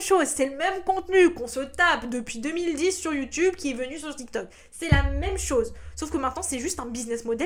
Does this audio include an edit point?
no; 0 cuts

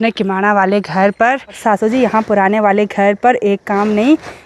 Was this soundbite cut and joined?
yes; 1 cut; at 1.6 s

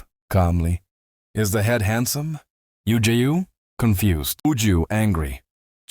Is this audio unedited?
no; 1 cut; at 4.4 s

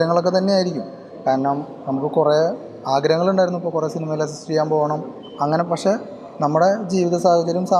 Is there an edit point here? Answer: no; 0 cuts

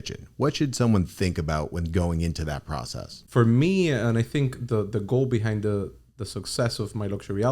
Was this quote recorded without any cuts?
no; 1 cut; at 3.2 s

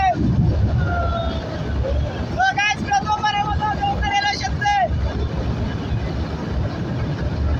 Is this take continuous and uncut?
yes; 0 cuts

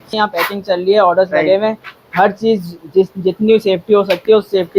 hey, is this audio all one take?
yes; 0 cuts

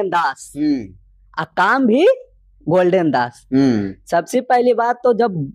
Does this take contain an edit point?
no; 0 cuts

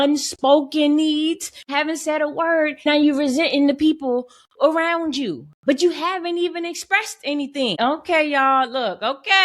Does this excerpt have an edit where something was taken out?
yes; 3 cuts; at 1.6 s, 2.9 s, 7.8 s

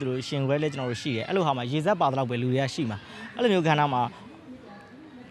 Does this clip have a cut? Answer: no; 0 cuts

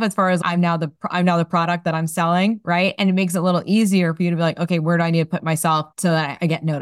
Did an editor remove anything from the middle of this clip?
yes; 1 cut; at 5.9 s

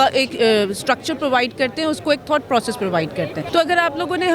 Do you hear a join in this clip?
yes; 1 cut; at 3.4 s

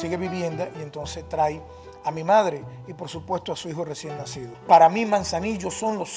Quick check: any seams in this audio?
yes; 1 cut; at 4.5 s

